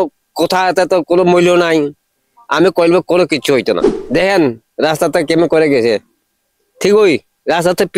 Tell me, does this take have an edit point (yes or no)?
yes